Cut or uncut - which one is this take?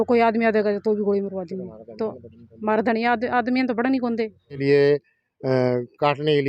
cut